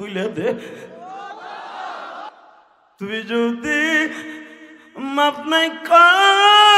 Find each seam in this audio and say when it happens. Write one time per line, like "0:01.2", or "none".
0:02.3